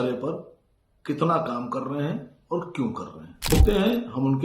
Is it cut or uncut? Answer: cut